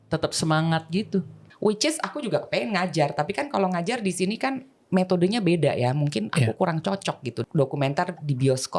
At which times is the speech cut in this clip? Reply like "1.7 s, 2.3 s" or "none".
1.4 s, 7.3 s